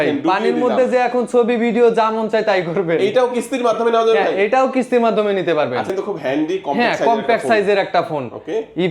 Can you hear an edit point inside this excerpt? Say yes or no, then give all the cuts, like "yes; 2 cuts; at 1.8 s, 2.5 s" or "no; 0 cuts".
yes; 1 cut; at 5.9 s